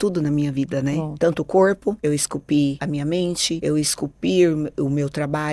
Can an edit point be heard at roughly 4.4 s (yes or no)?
no